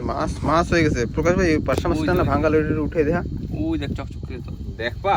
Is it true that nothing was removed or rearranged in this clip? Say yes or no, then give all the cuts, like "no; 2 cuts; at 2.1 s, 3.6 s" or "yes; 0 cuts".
yes; 0 cuts